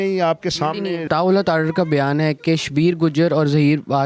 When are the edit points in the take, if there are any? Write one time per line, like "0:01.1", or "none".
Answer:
0:01.1